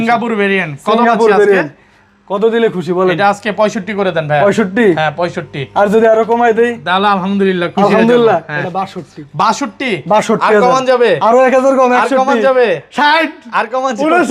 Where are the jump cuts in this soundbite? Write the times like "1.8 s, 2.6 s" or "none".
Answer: none